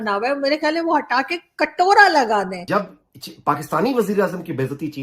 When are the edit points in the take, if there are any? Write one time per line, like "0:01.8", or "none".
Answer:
0:02.6